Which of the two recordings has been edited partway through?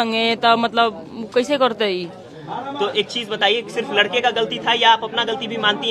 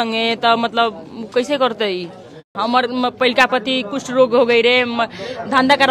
second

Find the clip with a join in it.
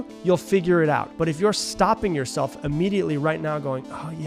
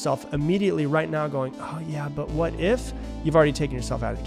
first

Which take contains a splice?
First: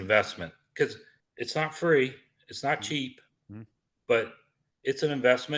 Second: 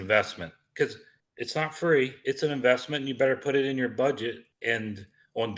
second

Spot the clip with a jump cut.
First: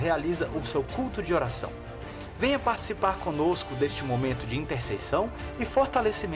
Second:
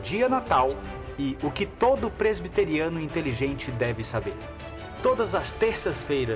first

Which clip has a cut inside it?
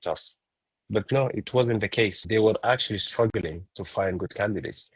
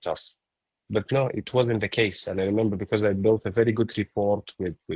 first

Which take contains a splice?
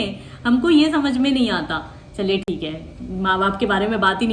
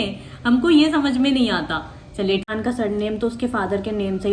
second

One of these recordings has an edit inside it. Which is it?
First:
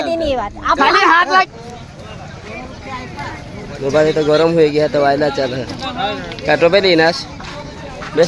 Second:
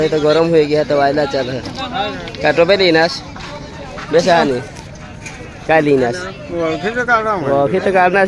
first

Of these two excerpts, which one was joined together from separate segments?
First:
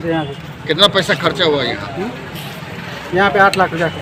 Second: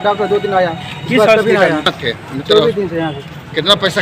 second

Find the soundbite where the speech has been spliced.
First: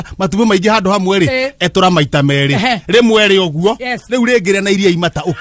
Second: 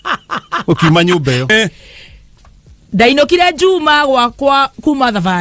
second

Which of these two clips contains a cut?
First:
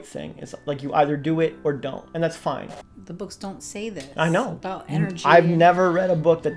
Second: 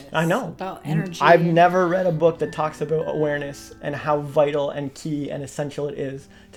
first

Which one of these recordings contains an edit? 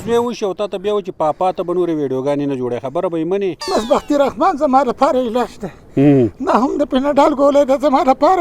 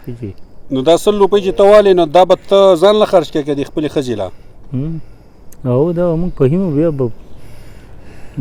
first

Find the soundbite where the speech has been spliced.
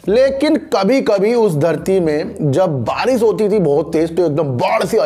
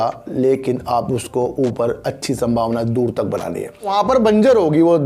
second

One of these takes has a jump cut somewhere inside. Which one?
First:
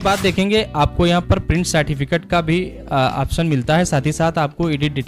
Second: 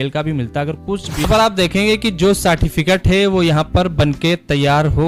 second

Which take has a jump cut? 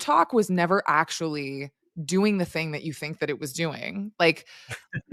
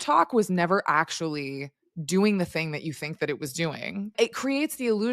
second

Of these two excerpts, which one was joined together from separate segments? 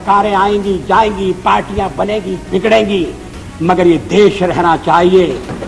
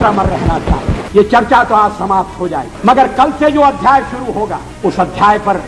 second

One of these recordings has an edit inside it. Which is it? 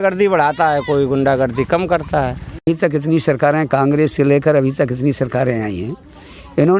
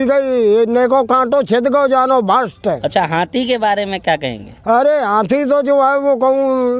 first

